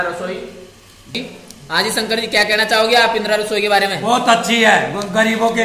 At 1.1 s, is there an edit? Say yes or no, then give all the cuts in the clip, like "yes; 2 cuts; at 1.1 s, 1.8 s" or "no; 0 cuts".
yes; 1 cut; at 1.1 s